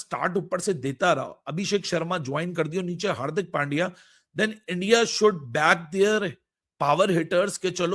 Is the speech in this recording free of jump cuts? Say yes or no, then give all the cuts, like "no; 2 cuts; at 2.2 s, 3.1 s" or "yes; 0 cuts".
yes; 0 cuts